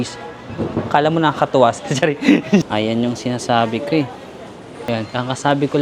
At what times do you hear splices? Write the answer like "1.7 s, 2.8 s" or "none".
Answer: 2.6 s, 4.7 s